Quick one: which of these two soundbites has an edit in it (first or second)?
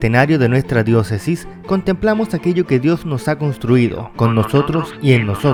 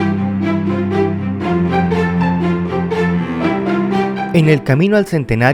second